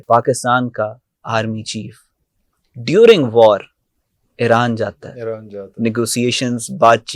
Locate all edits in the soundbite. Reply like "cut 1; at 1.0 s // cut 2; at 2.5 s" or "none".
none